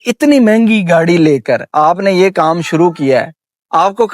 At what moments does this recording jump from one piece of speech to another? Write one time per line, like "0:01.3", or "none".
none